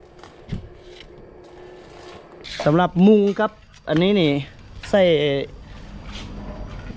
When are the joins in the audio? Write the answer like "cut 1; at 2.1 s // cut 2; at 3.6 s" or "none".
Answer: cut 1; at 2.4 s